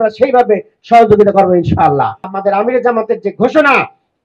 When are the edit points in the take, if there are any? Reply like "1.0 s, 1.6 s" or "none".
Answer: 2.3 s